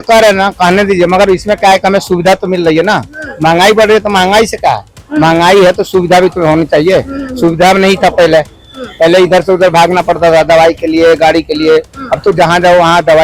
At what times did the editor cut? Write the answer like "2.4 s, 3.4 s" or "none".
none